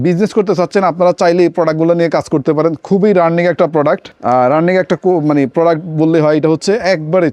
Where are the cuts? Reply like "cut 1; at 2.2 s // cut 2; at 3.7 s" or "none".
none